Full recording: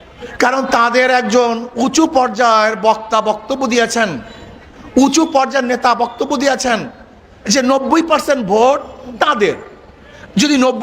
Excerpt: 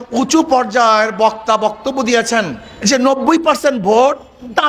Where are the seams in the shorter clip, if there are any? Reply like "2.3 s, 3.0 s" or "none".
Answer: 2.6 s